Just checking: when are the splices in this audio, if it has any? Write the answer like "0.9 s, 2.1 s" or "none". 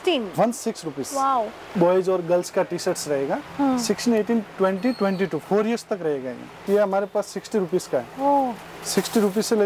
1.6 s, 6.6 s